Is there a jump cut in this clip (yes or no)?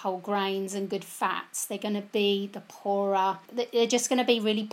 yes